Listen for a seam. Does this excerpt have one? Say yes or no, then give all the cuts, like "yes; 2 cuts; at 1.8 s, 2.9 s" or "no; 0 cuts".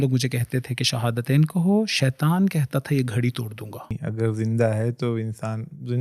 yes; 1 cut; at 4.0 s